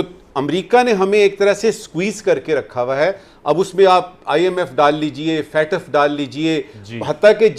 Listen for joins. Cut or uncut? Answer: uncut